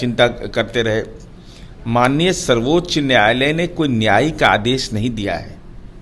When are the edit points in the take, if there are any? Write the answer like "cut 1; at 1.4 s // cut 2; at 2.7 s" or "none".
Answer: none